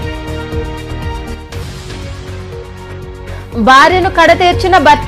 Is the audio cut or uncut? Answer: uncut